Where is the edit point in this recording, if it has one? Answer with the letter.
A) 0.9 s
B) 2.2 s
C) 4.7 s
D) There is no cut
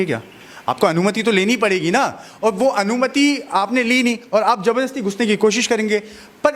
D